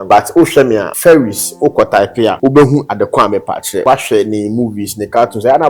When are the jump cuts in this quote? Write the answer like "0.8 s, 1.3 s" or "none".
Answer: 0.9 s, 2.4 s, 3.8 s